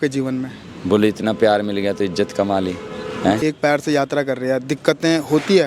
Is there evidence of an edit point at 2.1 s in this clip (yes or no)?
no